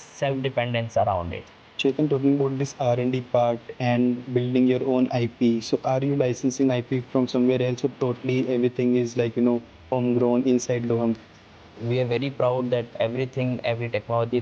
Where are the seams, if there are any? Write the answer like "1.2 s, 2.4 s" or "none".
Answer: 1.7 s, 11.6 s